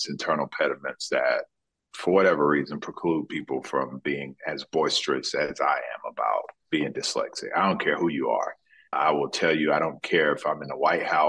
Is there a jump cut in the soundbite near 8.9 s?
yes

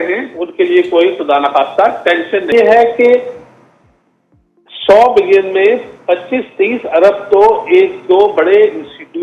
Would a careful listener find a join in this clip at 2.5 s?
yes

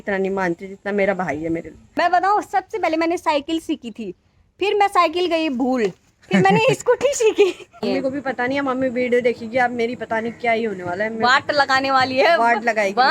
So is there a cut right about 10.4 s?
no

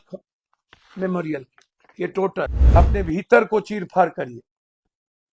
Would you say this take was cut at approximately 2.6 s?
yes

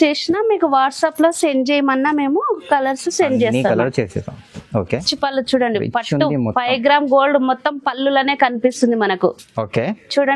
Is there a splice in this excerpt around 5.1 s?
yes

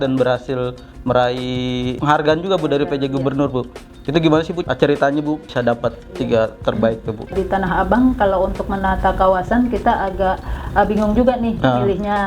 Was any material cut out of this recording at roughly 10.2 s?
no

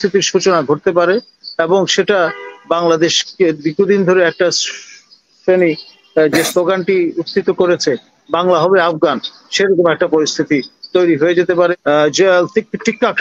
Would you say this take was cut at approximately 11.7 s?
yes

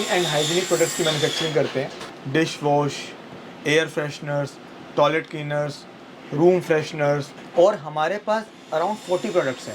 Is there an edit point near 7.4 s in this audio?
yes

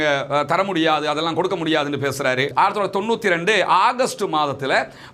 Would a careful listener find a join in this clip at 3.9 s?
no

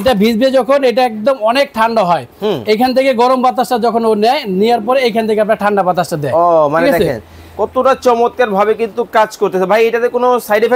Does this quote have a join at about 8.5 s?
no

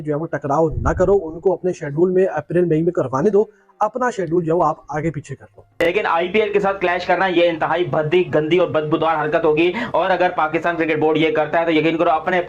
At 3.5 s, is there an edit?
no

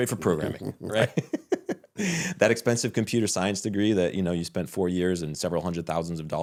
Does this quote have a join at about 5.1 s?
no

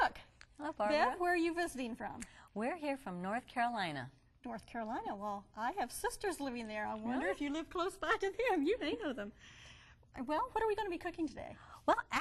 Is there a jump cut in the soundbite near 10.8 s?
no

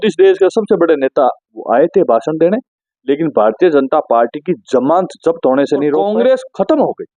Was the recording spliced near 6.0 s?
no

